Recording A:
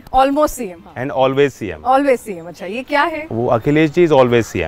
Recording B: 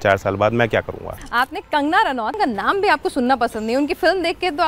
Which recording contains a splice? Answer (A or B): B